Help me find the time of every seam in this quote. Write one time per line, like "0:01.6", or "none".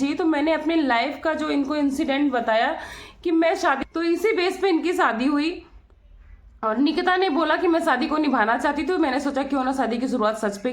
0:03.8